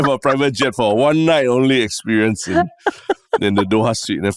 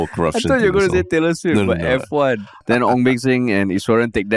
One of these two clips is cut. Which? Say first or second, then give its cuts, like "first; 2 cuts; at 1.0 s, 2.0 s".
second; 1 cut; at 2.6 s